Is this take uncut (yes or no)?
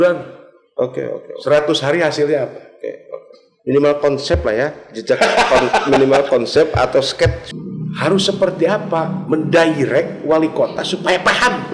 no